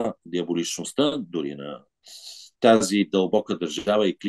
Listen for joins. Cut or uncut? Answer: uncut